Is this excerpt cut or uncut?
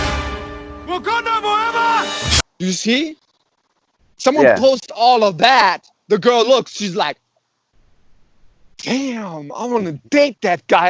uncut